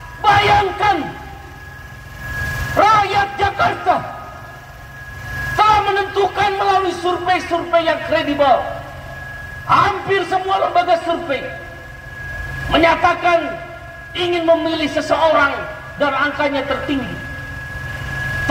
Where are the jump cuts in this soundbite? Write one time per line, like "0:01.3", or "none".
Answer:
none

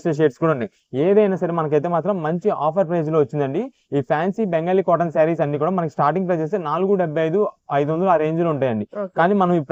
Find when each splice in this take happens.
none

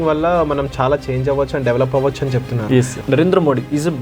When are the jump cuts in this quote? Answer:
0:03.0

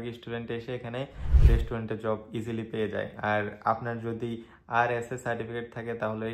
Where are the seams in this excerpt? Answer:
none

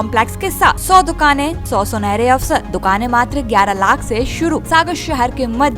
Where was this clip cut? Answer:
0:00.8
0:01.6
0:02.7
0:04.6

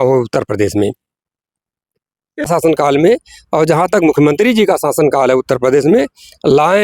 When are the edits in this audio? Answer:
0:02.5

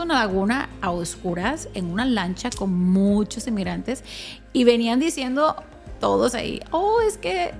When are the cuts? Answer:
none

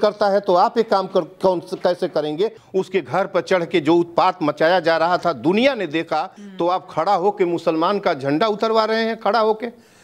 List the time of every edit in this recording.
0:02.6
0:06.4

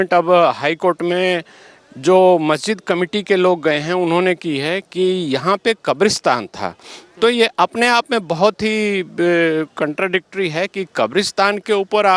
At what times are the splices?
none

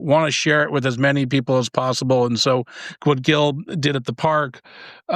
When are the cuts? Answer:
none

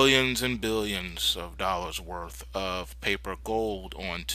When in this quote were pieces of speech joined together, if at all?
0:01.5

